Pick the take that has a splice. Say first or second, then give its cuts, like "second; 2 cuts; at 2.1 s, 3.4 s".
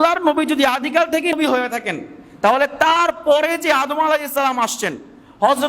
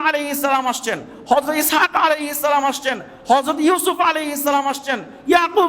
first; 1 cut; at 1.3 s